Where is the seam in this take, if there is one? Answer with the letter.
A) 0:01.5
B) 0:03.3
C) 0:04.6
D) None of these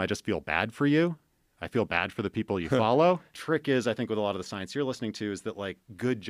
B